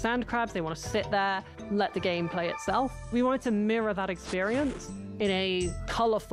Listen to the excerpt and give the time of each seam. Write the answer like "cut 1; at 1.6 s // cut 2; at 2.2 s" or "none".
none